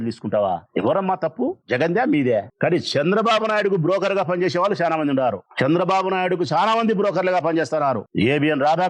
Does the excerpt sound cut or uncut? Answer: cut